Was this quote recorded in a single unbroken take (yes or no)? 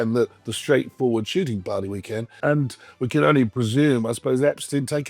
no